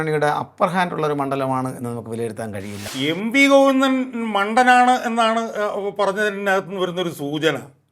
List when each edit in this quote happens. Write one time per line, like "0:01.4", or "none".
0:02.9